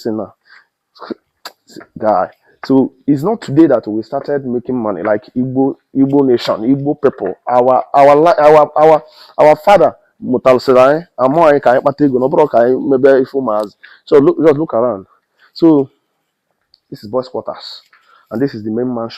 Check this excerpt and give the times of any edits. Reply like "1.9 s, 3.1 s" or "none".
none